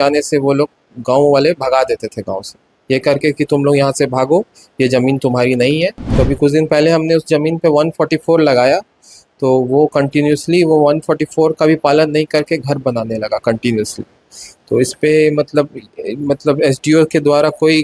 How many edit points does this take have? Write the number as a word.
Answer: one